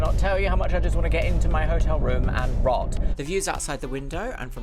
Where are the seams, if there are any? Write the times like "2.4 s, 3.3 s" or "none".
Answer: 3.0 s